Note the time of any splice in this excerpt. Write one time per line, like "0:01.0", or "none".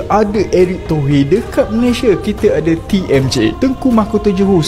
0:03.5

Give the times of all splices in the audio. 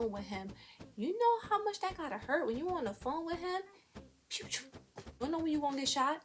0:00.9
0:05.2

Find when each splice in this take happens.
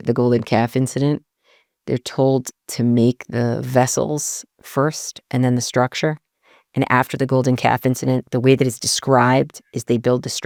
none

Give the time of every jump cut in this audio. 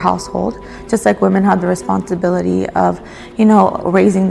none

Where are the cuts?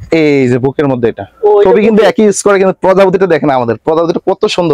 0:01.7

